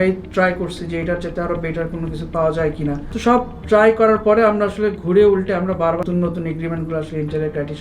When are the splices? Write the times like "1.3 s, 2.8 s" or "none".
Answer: 3.1 s, 6.0 s